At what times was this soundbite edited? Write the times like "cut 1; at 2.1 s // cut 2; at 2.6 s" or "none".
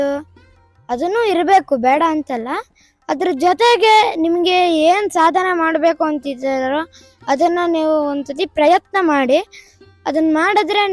none